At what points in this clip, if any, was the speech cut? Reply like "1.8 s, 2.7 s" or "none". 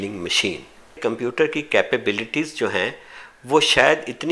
1.0 s